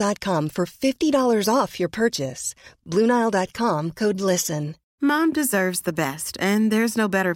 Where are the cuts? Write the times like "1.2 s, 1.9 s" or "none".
4.8 s